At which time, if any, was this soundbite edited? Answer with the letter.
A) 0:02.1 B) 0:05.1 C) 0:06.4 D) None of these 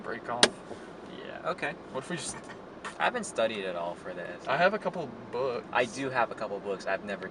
C